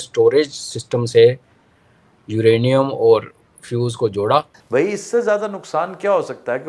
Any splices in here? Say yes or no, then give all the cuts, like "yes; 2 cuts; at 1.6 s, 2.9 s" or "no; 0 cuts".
yes; 1 cut; at 4.6 s